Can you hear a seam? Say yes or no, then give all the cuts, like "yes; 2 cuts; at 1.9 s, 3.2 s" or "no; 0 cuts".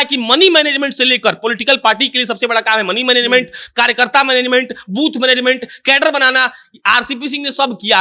no; 0 cuts